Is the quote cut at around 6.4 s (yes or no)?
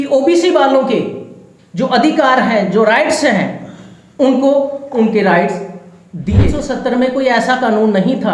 yes